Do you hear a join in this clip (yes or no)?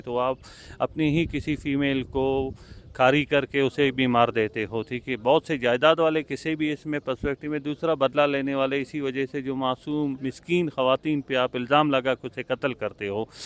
no